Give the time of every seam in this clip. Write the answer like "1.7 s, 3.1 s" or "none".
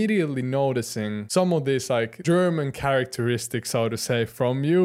1.2 s, 2.2 s